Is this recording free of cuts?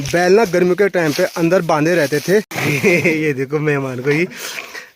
no; 1 cut; at 2.5 s

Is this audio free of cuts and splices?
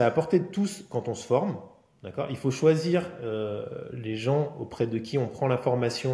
yes; 0 cuts

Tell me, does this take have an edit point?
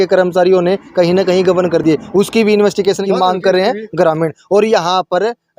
no; 0 cuts

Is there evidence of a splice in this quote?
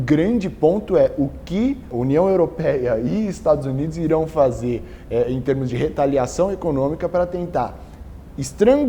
yes; 1 cut; at 2.0 s

